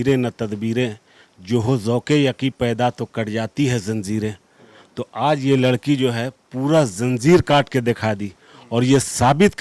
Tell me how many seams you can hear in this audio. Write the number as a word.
zero